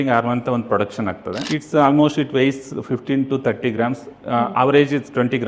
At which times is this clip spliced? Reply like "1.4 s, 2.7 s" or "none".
1.4 s